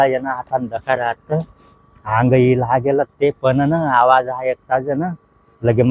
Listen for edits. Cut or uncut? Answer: uncut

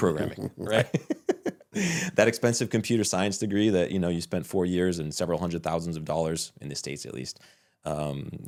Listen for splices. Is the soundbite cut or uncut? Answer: uncut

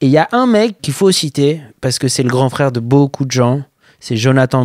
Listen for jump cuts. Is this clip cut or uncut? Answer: uncut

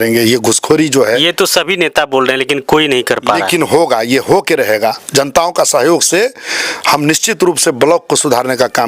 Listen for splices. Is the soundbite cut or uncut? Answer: uncut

